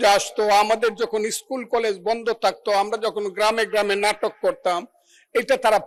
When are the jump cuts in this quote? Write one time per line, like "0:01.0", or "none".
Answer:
none